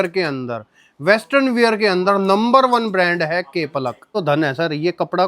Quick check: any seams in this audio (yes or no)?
yes